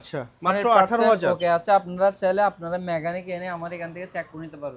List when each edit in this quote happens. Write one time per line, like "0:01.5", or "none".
none